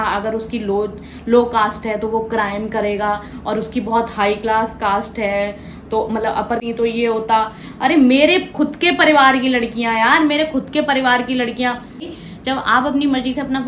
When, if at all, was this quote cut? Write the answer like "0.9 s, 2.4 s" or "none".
6.6 s, 12.0 s